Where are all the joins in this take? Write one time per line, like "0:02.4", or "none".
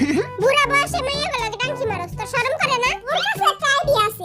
0:03.1